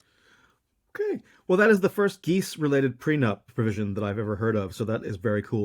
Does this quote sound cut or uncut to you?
uncut